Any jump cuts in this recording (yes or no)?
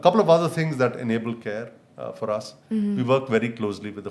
no